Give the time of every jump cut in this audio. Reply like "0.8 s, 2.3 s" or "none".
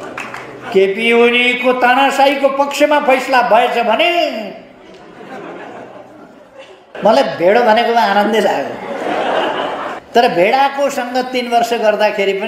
7.0 s, 10.0 s